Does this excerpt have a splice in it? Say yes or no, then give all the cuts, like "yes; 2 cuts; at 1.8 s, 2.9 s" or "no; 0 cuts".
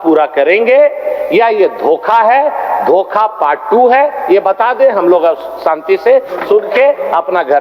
no; 0 cuts